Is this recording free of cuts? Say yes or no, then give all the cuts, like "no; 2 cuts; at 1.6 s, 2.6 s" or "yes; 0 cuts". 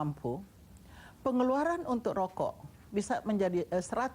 yes; 0 cuts